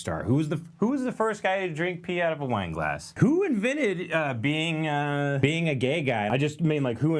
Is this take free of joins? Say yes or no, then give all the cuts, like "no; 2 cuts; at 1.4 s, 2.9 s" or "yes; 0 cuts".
no; 3 cuts; at 3.1 s, 5.4 s, 6.3 s